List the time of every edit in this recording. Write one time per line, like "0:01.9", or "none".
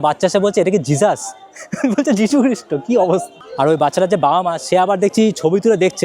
0:03.4